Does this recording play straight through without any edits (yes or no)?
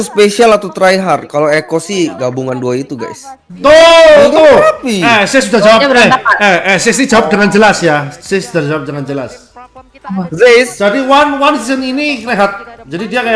no